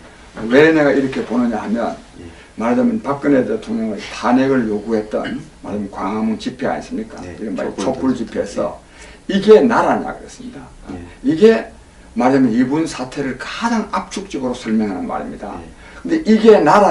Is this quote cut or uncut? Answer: cut